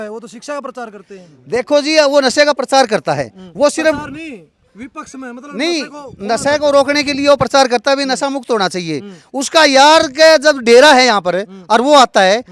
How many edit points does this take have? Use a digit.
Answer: 0